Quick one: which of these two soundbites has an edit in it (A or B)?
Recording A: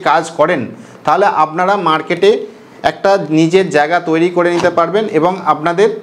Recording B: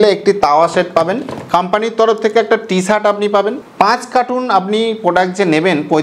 B